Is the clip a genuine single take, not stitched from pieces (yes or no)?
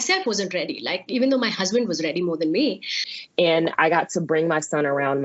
no